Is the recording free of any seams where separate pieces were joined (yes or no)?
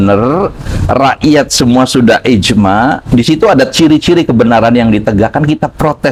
yes